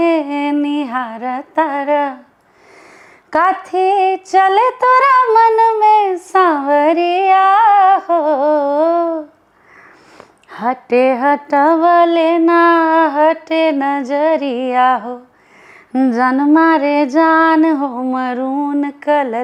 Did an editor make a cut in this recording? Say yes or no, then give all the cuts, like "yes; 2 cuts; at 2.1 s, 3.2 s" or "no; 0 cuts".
no; 0 cuts